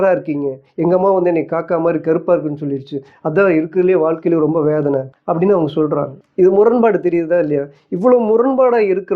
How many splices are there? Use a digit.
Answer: 2